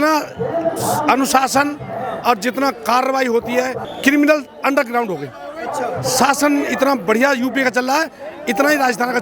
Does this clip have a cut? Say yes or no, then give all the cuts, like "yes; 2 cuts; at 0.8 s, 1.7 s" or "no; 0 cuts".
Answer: yes; 1 cut; at 3.8 s